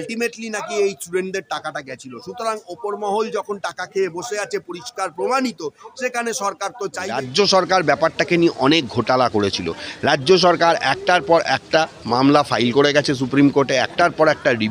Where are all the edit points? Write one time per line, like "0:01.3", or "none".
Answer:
0:07.1